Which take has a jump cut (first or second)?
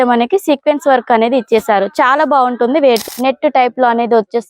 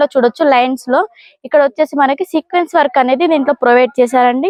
first